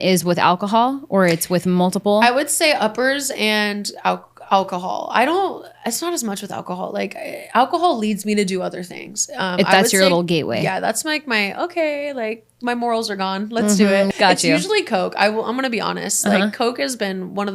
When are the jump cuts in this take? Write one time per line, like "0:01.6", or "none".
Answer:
0:14.1